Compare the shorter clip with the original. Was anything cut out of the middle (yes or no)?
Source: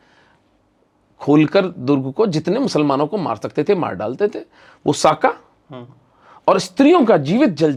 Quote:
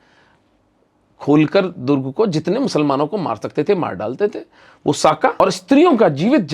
yes